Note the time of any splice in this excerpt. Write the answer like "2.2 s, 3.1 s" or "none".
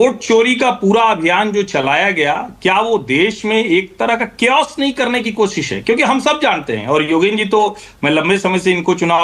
none